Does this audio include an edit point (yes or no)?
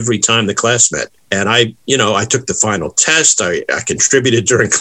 yes